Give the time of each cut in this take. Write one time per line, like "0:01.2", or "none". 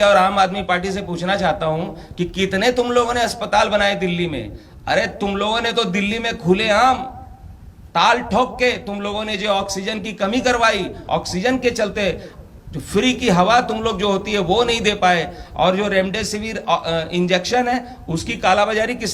none